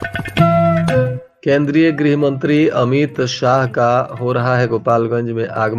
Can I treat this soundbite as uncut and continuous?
no; 1 cut; at 1.2 s

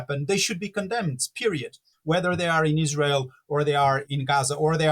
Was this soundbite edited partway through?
yes; 2 cuts; at 1.9 s, 4.1 s

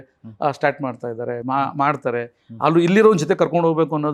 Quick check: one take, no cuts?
yes; 0 cuts

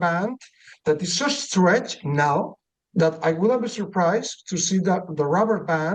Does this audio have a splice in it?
no; 0 cuts

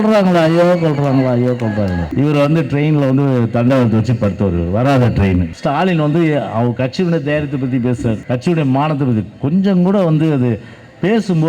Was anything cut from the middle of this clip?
yes; 3 cuts; at 2.1 s, 5.5 s, 8.2 s

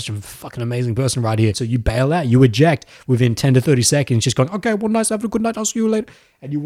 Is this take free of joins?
no; 1 cut; at 1.6 s

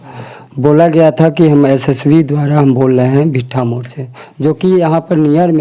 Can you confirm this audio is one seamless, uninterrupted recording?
yes; 0 cuts

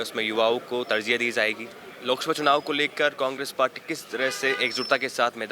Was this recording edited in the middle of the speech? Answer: yes; 1 cut; at 1.9 s

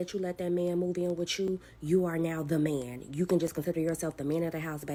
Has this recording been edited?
no; 0 cuts

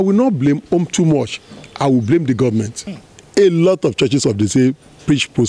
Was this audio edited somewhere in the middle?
yes; 1 cut; at 2.8 s

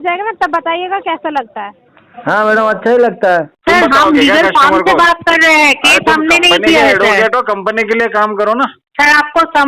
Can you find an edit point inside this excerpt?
yes; 1 cut; at 3.5 s

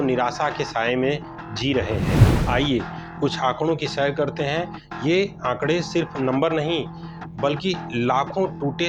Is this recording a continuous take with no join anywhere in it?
yes; 0 cuts

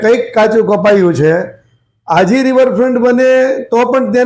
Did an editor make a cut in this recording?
no; 0 cuts

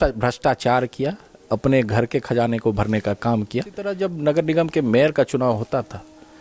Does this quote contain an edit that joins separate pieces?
yes; 1 cut; at 3.9 s

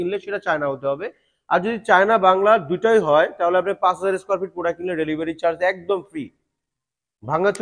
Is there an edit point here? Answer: no; 0 cuts

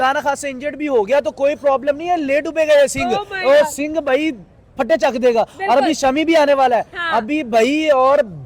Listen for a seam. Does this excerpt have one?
no; 0 cuts

